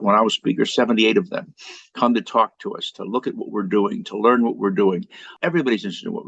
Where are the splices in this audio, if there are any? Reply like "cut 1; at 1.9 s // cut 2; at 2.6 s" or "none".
cut 1; at 5.3 s